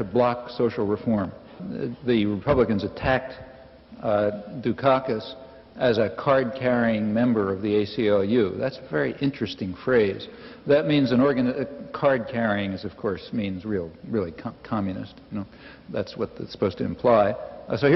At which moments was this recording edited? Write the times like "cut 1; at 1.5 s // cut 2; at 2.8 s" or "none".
cut 1; at 1.6 s